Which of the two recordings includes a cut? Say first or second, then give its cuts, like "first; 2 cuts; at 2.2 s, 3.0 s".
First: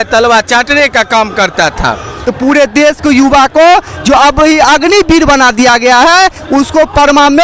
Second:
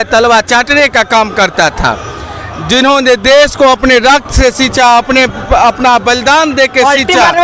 first; 1 cut; at 2.2 s